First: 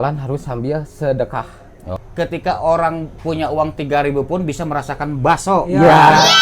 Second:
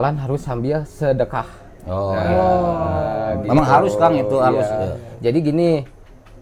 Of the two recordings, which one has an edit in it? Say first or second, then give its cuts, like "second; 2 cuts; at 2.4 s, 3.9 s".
first; 1 cut; at 2.0 s